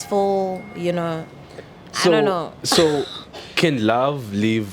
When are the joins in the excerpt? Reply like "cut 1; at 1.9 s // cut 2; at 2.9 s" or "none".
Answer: none